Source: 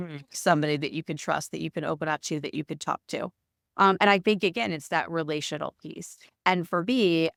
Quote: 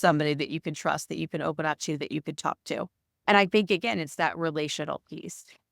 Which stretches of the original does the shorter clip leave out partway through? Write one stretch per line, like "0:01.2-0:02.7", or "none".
0:03.7-0:04.0